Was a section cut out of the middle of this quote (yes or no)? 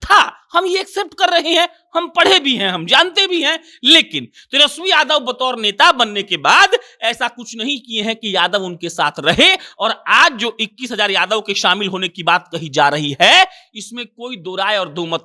no